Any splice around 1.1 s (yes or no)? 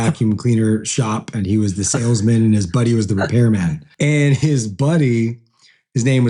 no